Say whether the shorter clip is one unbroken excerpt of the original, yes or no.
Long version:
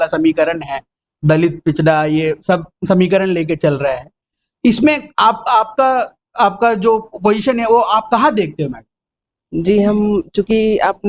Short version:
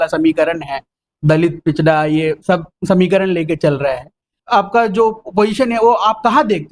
no